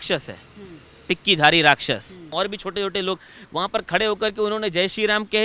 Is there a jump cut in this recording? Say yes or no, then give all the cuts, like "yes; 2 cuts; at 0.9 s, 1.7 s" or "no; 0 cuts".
yes; 1 cut; at 2.3 s